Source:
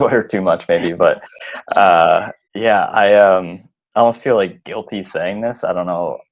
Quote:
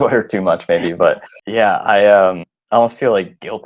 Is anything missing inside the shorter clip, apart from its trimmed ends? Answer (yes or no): yes